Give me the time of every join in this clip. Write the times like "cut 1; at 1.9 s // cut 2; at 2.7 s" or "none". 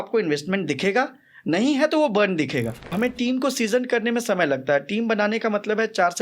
cut 1; at 2.9 s